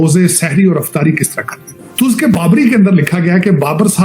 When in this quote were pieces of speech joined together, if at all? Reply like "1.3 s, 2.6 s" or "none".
1.8 s